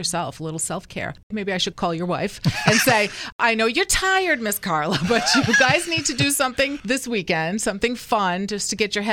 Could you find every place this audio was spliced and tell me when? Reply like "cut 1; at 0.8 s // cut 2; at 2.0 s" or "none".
cut 1; at 1.2 s // cut 2; at 6.8 s